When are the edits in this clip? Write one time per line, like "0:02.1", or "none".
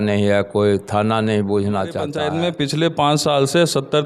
0:02.1